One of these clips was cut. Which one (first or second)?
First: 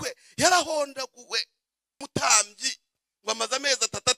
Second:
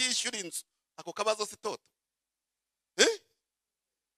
first